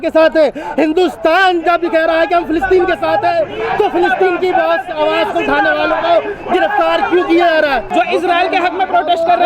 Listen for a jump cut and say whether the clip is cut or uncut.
cut